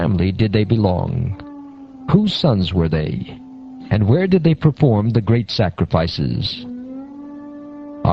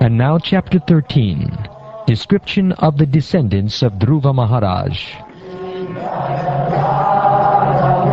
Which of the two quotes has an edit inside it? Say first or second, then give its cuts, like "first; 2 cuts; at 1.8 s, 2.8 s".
second; 1 cut; at 5.6 s